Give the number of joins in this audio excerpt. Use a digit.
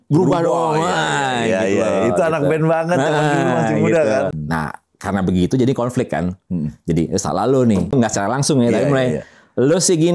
2